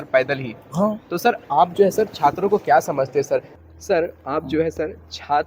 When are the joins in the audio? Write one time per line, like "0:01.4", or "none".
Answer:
0:03.5

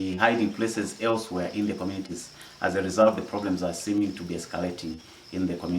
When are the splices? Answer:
none

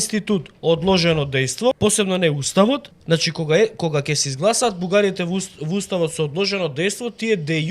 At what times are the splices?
0:01.8
0:02.9

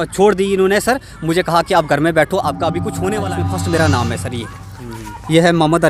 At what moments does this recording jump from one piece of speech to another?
0:03.4

